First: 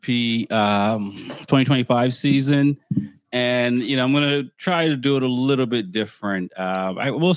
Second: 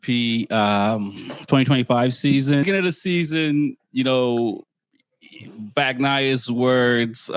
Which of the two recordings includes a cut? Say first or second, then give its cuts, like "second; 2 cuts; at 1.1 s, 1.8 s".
second; 1 cut; at 2.6 s